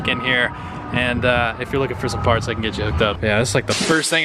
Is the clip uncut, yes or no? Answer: no